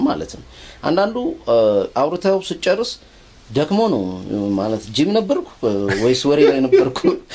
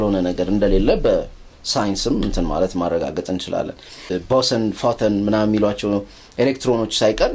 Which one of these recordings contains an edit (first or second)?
second